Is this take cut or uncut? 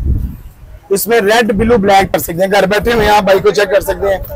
cut